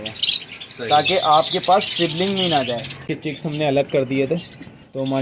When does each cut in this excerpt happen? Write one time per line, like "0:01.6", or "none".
0:03.1